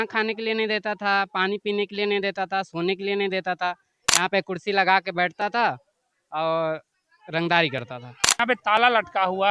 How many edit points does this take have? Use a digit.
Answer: 1